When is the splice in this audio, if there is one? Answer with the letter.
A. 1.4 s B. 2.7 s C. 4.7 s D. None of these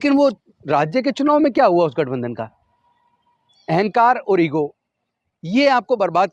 D